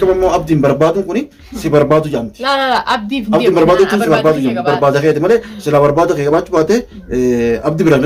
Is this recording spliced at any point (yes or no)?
no